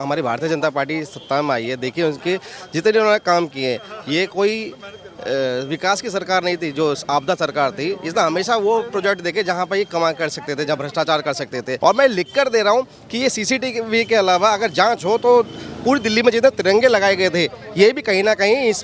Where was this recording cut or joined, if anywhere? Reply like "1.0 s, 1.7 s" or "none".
11.7 s